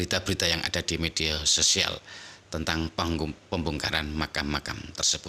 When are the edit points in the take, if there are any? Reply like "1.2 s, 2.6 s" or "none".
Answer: none